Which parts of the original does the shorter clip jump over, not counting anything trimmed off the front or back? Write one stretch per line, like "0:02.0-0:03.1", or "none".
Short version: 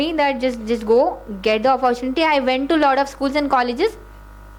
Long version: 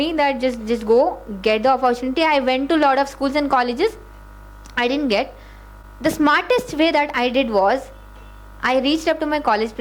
none